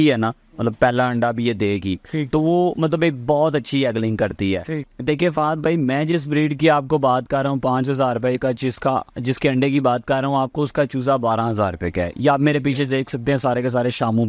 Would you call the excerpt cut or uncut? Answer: cut